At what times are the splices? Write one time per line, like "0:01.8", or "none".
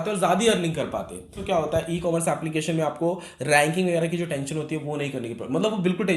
0:01.4